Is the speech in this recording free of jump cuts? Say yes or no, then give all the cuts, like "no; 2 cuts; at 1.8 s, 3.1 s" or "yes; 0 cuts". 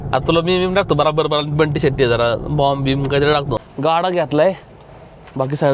no; 1 cut; at 3.7 s